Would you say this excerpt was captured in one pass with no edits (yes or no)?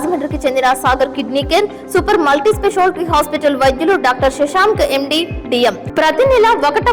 no